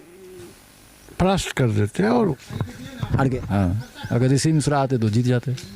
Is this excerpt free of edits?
no; 1 cut; at 2.3 s

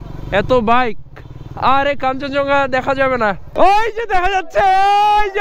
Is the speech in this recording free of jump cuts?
no; 1 cut; at 3.5 s

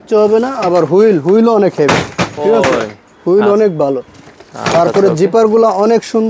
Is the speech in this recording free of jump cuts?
yes; 0 cuts

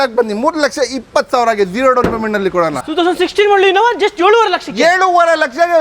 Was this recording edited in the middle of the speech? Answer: yes; 1 cut; at 2.8 s

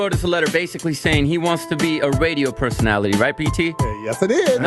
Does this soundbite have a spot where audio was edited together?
no; 0 cuts

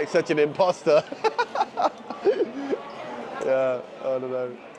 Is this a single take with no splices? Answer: yes; 0 cuts

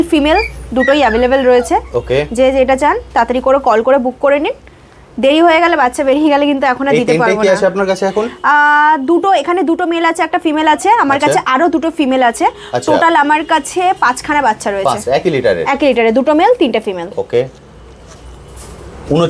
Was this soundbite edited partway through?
no; 0 cuts

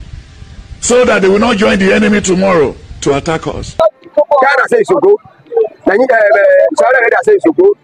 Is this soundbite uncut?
no; 1 cut; at 3.8 s

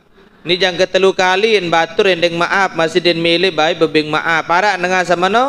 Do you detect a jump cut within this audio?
no; 0 cuts

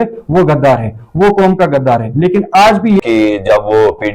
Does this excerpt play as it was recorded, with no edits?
no; 1 cut; at 3.0 s

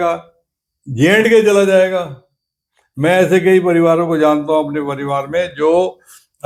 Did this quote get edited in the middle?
no; 0 cuts

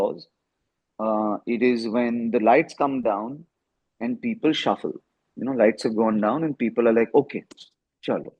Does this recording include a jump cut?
no; 0 cuts

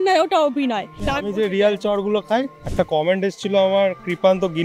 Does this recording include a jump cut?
yes; 2 cuts; at 1.0 s, 2.6 s

